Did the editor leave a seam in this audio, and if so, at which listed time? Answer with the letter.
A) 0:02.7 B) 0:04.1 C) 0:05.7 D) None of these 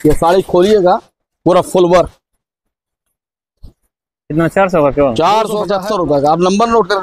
C